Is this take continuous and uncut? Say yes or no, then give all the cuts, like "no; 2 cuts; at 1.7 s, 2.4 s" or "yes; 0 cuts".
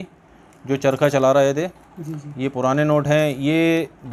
yes; 0 cuts